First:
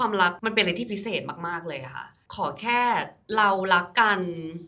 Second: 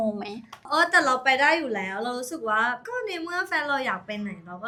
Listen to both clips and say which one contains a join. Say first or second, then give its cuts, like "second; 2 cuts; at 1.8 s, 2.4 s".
first; 1 cut; at 2.2 s